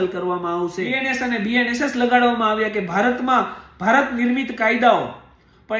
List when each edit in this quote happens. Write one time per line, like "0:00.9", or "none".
0:01.0